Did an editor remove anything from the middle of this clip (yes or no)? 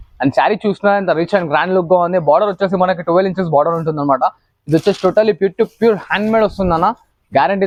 no